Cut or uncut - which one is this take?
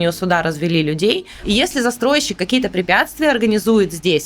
cut